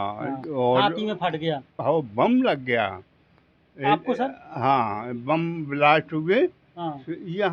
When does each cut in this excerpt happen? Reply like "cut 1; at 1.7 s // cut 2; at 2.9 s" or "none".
cut 1; at 1.7 s